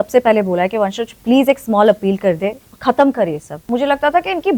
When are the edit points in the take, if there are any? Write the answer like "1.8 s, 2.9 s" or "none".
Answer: 3.6 s